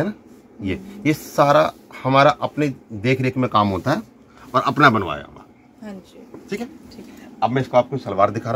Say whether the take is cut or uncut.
uncut